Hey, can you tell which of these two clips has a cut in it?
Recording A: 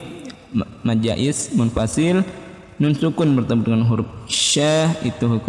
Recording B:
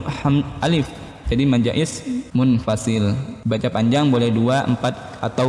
B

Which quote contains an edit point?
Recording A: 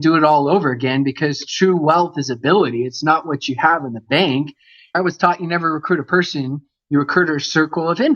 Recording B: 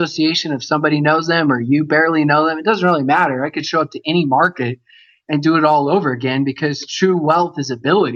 A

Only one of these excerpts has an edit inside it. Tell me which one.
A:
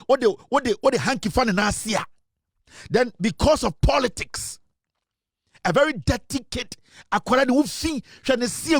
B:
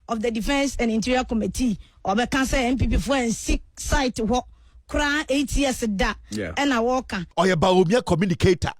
B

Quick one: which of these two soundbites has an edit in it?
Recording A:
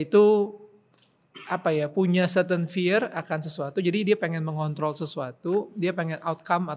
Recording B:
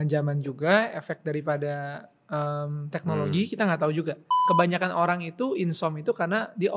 B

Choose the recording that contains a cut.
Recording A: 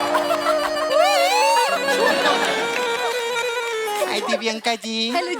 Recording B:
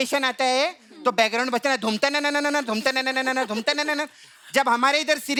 A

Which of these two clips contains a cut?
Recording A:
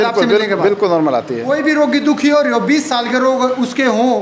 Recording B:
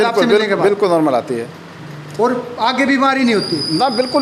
A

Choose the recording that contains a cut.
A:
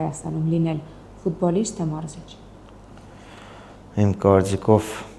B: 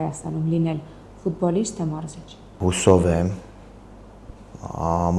B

